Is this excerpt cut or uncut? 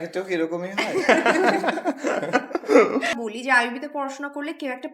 cut